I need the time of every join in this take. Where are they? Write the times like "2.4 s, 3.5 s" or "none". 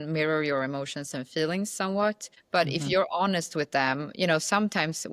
2.3 s